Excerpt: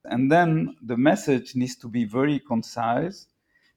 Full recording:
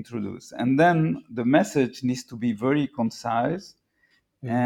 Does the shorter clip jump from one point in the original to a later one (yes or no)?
no